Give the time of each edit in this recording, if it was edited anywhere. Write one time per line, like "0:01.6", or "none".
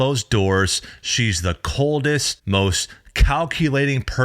0:02.3